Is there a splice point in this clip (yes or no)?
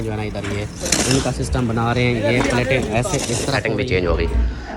yes